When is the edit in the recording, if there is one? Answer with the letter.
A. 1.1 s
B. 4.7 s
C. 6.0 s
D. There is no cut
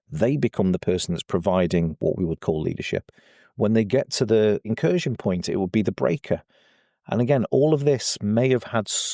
B